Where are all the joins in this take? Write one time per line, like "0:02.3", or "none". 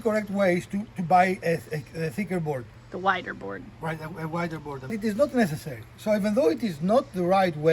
0:02.8
0:04.9